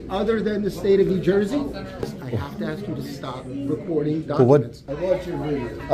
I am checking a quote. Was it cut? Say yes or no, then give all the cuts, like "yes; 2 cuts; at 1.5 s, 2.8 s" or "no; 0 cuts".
yes; 2 cuts; at 2.1 s, 4.8 s